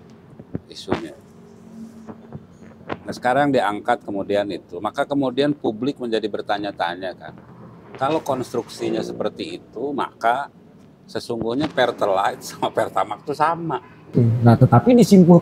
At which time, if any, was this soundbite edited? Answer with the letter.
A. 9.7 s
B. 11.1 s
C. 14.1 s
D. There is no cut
C